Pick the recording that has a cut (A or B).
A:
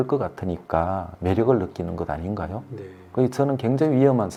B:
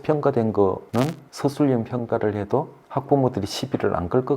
B